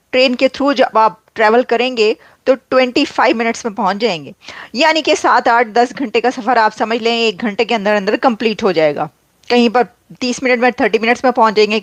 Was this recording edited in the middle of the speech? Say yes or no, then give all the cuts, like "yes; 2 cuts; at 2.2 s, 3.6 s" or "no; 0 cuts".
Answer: no; 0 cuts